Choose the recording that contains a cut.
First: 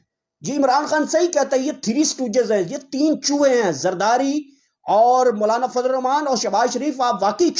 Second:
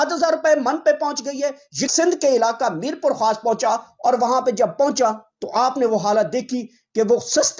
second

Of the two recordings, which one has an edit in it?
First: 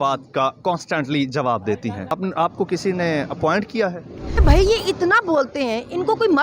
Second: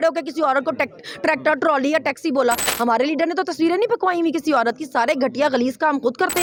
first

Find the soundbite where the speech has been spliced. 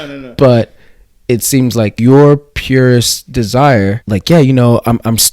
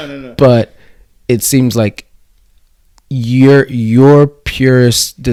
first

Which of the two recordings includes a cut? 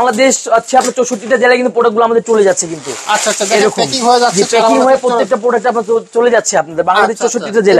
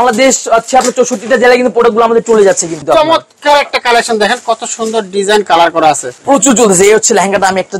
second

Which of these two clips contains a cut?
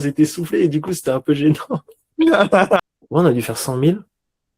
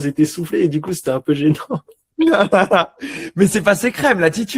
first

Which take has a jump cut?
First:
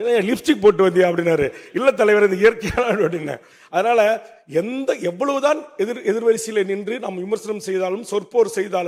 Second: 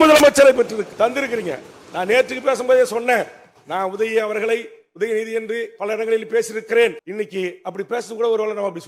second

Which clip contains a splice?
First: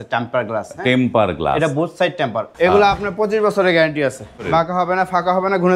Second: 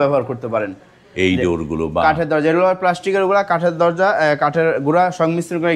first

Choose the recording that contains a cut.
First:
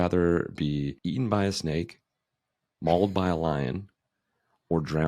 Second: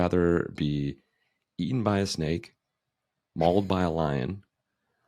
first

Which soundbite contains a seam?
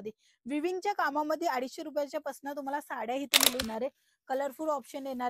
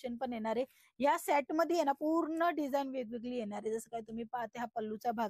first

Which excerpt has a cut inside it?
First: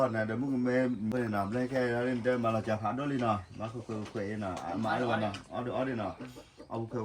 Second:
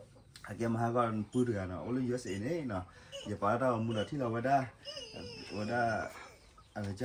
first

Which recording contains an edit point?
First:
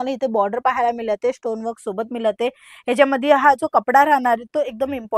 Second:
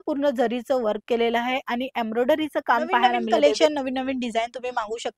second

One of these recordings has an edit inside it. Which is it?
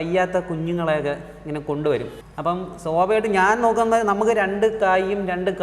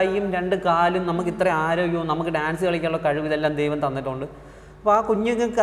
first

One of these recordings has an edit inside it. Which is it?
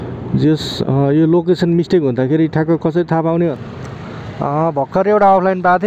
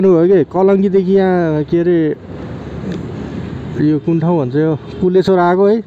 first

